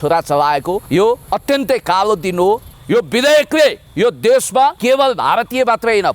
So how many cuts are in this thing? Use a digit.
4